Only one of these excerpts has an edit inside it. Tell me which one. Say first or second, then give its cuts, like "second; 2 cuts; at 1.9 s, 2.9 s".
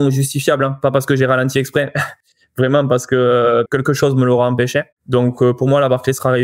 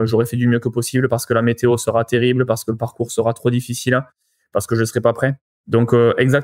first; 2 cuts; at 3.7 s, 5.0 s